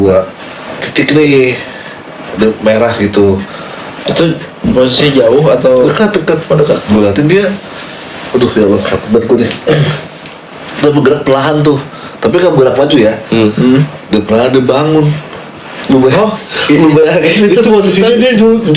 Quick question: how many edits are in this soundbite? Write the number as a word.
one